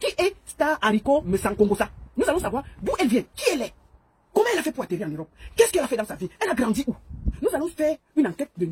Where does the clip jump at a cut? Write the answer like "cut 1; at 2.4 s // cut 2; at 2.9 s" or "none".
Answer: cut 1; at 1.2 s

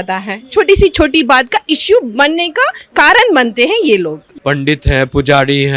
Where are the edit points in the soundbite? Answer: cut 1; at 4.3 s

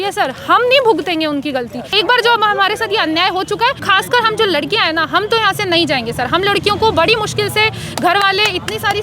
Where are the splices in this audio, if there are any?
cut 1; at 1.9 s // cut 2; at 3.8 s

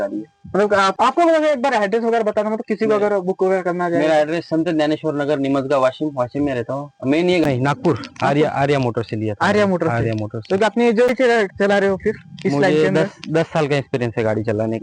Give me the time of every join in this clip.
cut 1; at 0.9 s // cut 2; at 7.4 s // cut 3; at 11.1 s

